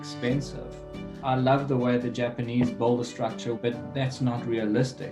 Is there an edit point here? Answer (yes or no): yes